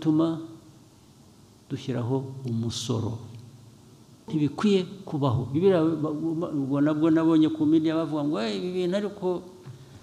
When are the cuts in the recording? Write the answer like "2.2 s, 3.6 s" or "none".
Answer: 4.2 s